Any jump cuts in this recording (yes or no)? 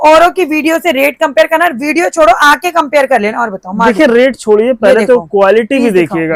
no